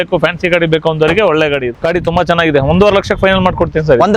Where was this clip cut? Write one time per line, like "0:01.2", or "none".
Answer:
0:01.7